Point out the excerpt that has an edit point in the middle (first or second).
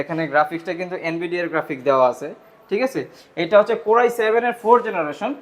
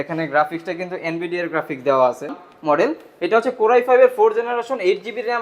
second